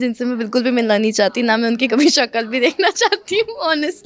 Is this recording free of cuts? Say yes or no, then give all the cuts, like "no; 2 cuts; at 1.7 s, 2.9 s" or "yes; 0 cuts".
yes; 0 cuts